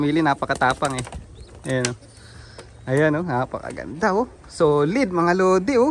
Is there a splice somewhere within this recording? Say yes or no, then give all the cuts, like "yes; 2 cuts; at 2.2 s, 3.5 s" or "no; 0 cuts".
no; 0 cuts